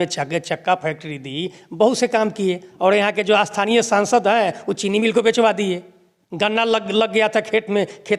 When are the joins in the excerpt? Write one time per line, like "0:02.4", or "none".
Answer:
none